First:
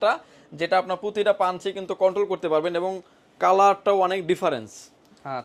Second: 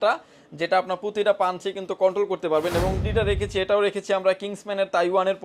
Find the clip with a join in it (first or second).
second